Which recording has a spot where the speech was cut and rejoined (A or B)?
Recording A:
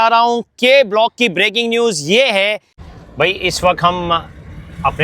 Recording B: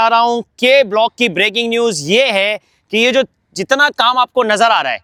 A